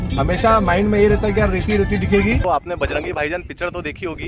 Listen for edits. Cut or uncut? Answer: cut